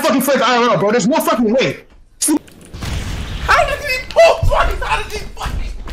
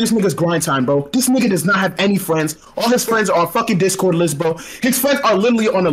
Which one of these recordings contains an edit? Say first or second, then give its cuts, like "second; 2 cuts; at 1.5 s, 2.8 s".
first; 1 cut; at 2.4 s